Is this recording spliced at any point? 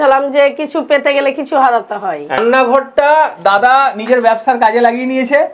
yes; 1 cut; at 2.4 s

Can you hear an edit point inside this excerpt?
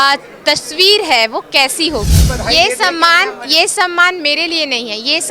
yes; 1 cut; at 2.2 s

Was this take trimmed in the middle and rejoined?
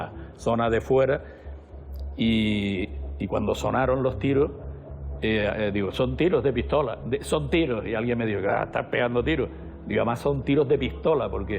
no; 0 cuts

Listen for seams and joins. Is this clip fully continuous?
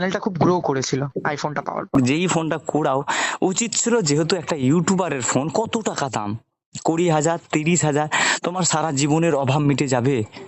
no; 1 cut; at 2.0 s

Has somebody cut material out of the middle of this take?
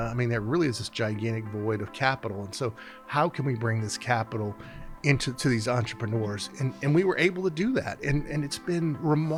no; 0 cuts

